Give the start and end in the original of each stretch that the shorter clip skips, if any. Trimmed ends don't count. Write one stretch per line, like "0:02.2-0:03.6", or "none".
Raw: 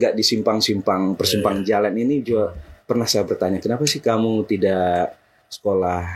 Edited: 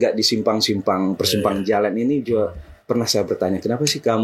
none